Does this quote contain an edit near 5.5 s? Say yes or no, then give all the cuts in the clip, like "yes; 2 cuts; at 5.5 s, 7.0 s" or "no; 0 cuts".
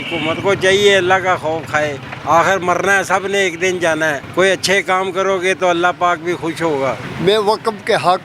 no; 3 cuts; at 2.1 s, 4.2 s, 7.1 s